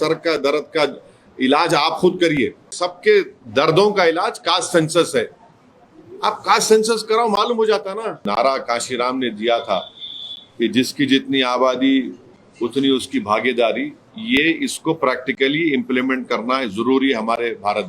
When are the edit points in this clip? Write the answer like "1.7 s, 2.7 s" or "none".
2.8 s, 8.2 s